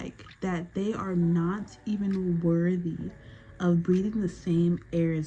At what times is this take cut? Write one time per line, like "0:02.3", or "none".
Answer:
none